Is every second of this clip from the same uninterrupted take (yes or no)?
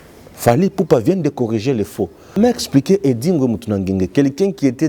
no